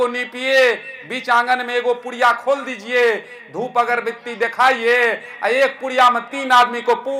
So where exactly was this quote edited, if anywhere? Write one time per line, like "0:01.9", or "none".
none